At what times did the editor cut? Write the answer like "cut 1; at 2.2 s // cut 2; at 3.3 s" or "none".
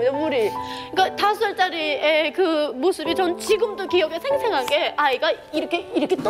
none